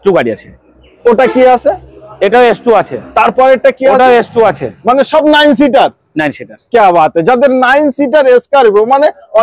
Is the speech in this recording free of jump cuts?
yes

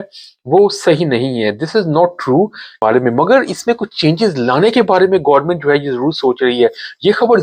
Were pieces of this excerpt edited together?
no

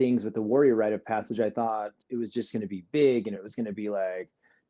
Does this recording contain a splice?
yes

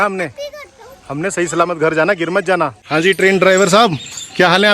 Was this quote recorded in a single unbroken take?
no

